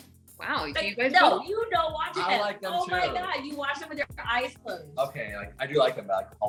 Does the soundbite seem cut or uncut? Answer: uncut